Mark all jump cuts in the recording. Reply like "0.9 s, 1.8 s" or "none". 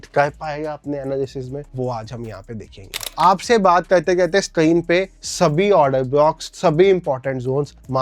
3.0 s, 5.2 s, 6.5 s